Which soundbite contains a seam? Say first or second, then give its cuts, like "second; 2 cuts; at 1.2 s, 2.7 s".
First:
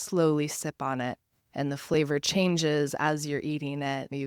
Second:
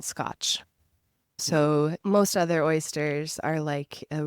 second; 2 cuts; at 1.4 s, 2.0 s